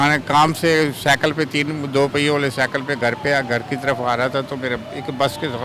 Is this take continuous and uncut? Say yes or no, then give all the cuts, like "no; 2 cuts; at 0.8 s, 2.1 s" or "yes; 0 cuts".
yes; 0 cuts